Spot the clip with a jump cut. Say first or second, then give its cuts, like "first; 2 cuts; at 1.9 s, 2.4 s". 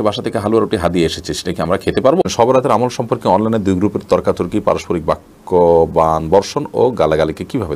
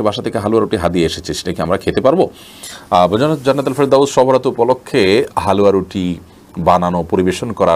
first; 1 cut; at 2.3 s